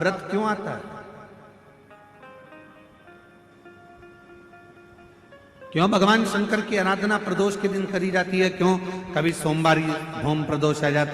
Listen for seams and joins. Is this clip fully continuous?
yes; 0 cuts

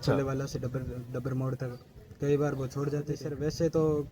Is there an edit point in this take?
yes; 1 cut; at 3.2 s

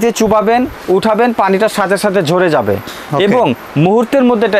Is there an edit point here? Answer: no; 0 cuts

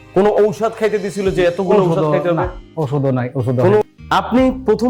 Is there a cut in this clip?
yes; 1 cut; at 3.8 s

